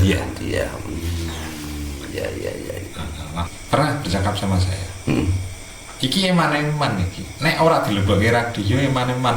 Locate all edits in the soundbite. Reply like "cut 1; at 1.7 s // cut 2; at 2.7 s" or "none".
cut 1; at 3.5 s

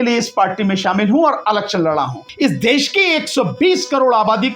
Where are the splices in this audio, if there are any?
cut 1; at 2.3 s

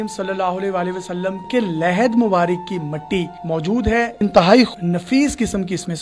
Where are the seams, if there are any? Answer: cut 1; at 1.4 s // cut 2; at 4.1 s // cut 3; at 4.7 s

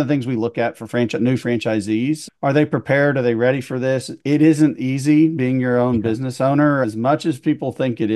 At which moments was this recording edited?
cut 1; at 2.3 s // cut 2; at 6.8 s

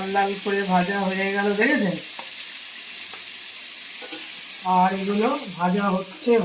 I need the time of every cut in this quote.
none

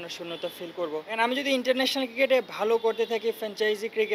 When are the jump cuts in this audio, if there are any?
cut 1; at 1.2 s

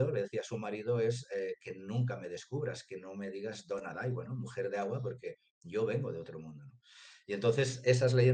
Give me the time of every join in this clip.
none

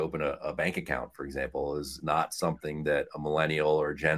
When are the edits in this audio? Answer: cut 1; at 1.9 s

